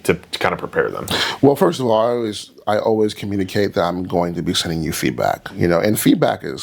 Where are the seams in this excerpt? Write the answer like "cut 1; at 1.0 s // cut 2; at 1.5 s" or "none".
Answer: none